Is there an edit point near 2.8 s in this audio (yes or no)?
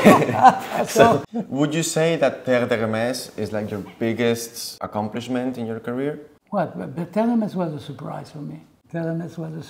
no